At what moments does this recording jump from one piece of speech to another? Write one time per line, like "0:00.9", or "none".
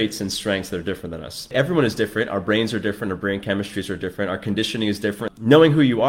0:01.5
0:05.3